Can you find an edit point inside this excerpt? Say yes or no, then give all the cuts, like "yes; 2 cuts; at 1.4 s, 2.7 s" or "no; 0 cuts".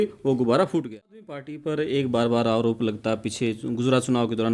yes; 1 cut; at 1.5 s